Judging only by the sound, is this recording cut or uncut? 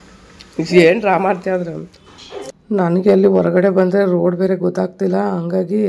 cut